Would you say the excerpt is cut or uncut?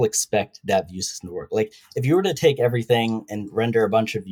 uncut